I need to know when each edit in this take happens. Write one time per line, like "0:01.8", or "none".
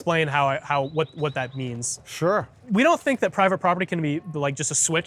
0:02.6